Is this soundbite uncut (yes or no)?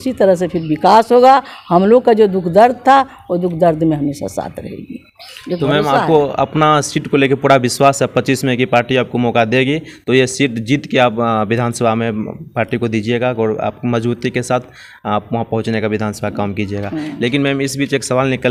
yes